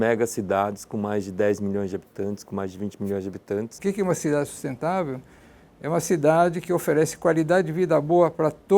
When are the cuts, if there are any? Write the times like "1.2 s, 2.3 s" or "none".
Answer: 3.7 s